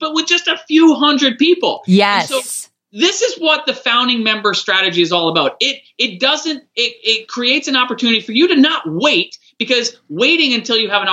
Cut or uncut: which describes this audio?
uncut